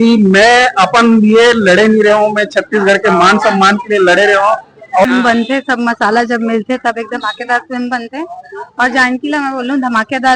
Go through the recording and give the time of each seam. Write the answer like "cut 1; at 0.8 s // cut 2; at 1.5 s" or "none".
cut 1; at 5.0 s